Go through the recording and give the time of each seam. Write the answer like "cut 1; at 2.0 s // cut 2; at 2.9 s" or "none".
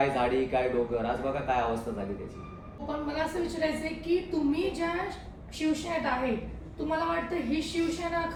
none